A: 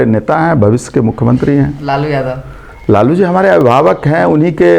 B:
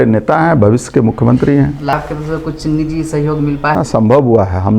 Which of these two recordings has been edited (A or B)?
B